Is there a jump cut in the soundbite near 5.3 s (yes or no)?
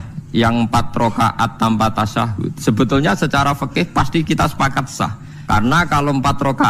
yes